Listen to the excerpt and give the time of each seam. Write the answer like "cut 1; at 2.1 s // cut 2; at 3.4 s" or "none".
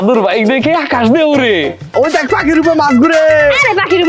cut 1; at 1.9 s